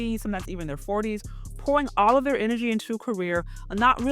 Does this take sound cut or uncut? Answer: uncut